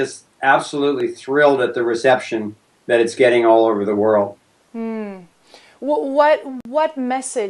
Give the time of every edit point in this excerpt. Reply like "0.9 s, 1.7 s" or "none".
1.1 s